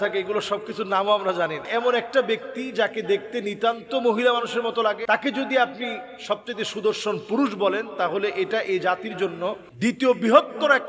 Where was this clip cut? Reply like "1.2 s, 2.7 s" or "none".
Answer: 1.7 s, 5.0 s, 9.7 s